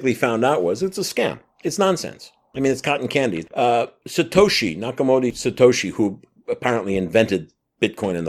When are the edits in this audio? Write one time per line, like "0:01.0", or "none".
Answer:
0:03.4